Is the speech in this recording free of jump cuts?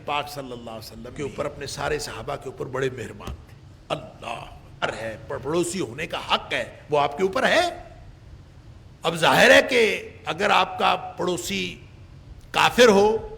no; 2 cuts; at 1.1 s, 4.8 s

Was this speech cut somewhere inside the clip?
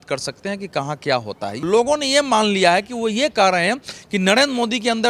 yes; 1 cut; at 1.6 s

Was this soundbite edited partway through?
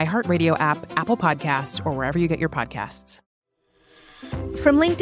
yes; 1 cut; at 3.2 s

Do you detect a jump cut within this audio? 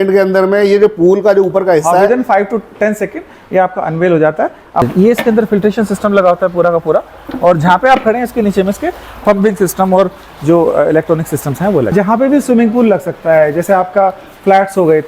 yes; 2 cuts; at 4.8 s, 11.9 s

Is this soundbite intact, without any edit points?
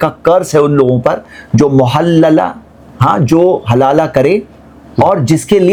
yes; 0 cuts

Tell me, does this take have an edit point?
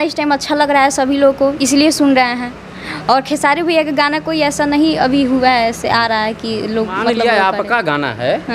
yes; 1 cut; at 7.1 s

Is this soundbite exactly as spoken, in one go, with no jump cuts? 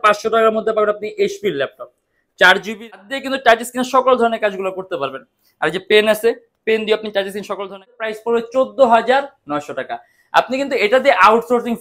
no; 2 cuts; at 3.0 s, 8.0 s

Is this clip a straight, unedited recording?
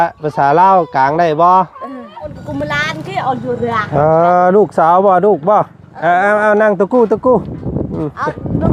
no; 1 cut; at 2.4 s

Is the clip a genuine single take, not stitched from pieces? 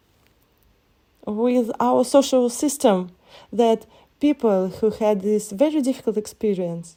yes; 0 cuts

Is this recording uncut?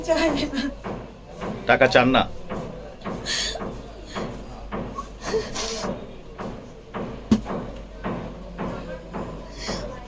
yes; 0 cuts

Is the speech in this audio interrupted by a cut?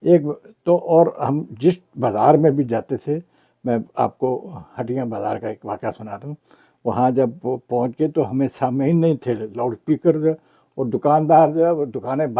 no; 0 cuts

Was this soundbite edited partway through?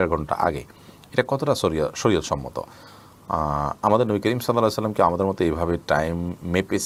no; 0 cuts

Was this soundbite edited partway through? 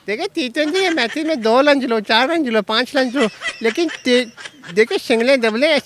no; 0 cuts

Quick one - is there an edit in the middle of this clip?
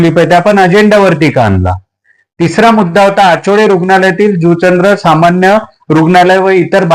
no; 0 cuts

